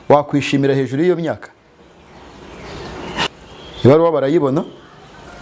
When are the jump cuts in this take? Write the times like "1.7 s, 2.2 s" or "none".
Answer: 3.3 s